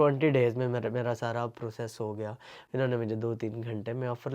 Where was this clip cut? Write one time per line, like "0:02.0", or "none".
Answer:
0:02.6